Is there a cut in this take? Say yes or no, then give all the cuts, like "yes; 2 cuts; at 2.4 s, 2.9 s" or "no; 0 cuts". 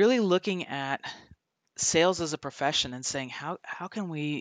no; 0 cuts